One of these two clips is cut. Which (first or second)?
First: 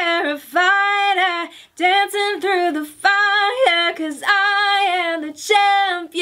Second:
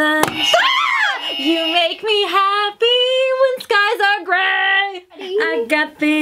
second